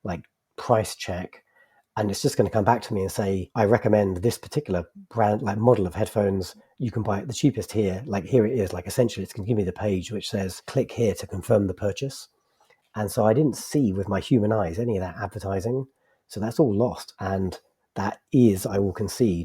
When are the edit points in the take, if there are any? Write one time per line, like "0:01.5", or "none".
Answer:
0:03.5
0:10.6
0:17.1